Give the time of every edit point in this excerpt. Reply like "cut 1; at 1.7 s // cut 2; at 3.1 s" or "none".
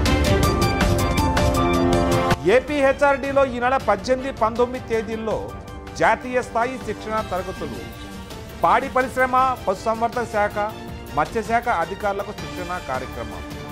none